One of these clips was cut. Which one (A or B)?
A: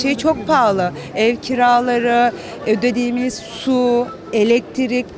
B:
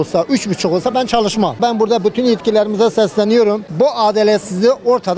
B